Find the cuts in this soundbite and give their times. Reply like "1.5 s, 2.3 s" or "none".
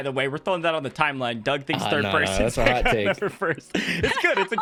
none